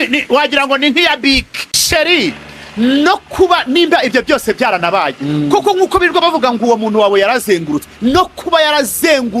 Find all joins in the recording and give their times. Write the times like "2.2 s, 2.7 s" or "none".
1.8 s

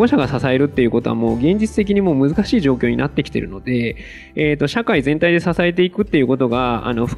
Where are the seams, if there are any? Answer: none

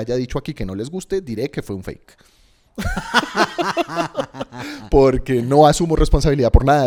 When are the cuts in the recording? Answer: none

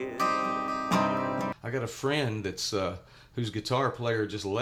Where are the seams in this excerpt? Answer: 1.5 s

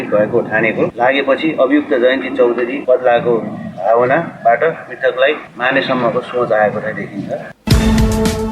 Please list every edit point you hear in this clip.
7.5 s

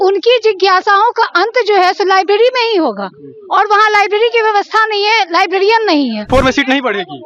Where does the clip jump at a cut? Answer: 6.3 s

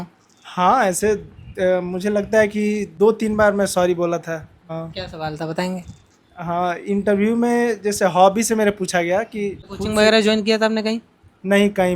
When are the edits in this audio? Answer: 2.9 s, 4.6 s, 9.7 s

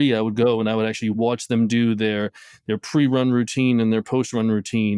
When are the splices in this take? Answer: none

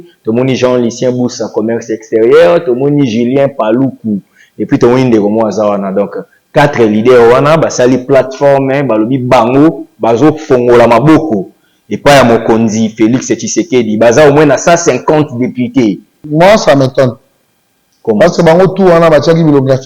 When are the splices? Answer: 16.1 s

